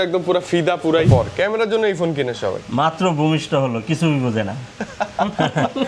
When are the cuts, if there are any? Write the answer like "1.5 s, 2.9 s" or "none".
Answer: 1.1 s